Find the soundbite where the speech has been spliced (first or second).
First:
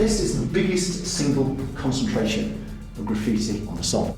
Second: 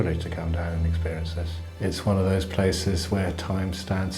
second